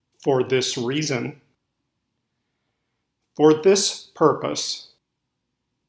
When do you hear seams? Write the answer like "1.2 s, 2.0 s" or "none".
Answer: 1.6 s, 5.0 s